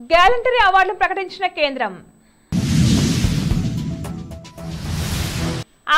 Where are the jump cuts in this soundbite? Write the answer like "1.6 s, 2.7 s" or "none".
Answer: none